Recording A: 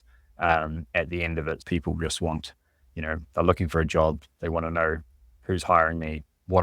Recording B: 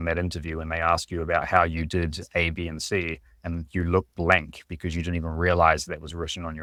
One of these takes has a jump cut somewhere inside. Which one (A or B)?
A